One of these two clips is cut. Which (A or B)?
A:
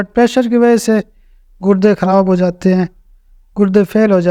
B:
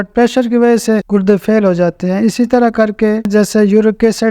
B